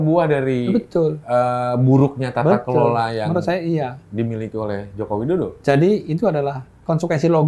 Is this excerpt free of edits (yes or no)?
yes